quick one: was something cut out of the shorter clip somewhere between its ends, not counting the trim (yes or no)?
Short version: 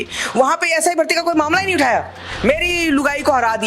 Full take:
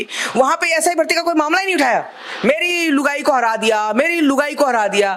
no